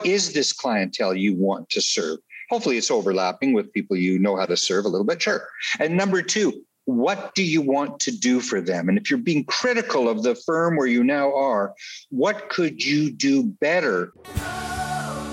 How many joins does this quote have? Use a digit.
1